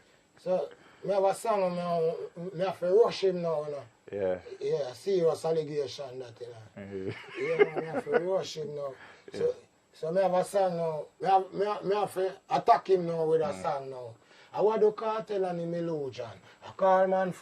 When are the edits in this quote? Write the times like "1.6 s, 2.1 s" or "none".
none